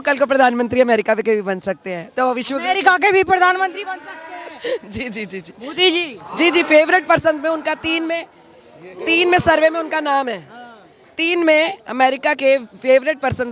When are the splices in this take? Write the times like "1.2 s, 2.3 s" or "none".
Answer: none